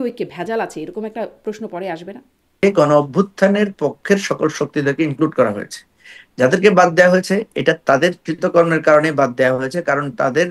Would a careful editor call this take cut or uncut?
cut